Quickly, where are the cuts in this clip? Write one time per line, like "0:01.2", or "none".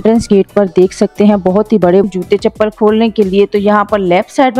0:02.0